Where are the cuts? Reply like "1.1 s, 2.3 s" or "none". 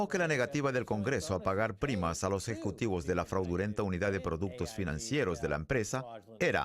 1.4 s